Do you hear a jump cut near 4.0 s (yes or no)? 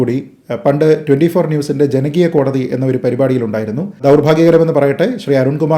yes